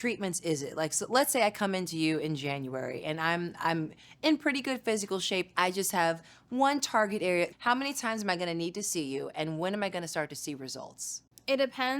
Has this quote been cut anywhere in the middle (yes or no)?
yes